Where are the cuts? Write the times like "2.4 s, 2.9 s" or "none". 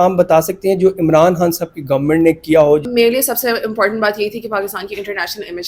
2.9 s